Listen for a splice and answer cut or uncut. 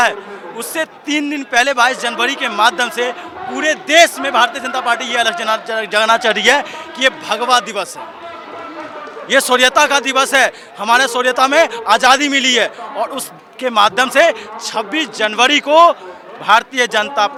uncut